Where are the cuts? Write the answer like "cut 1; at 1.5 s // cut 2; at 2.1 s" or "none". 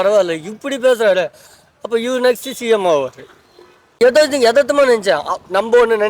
cut 1; at 4.0 s